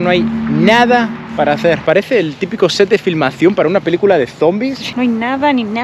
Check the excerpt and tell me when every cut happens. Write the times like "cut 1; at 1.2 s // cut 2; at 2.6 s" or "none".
cut 1; at 1.8 s // cut 2; at 4.8 s